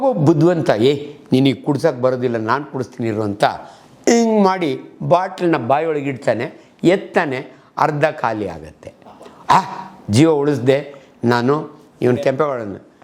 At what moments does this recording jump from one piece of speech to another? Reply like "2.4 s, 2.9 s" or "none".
none